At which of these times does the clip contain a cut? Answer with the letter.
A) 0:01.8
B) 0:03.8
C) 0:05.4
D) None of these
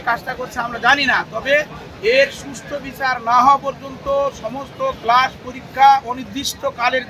D